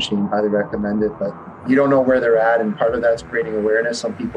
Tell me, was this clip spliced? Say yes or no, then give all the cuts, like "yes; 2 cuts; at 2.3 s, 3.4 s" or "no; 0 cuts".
yes; 1 cut; at 1.5 s